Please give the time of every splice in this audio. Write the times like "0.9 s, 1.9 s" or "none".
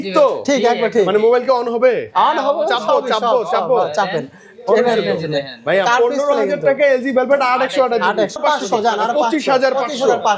8.4 s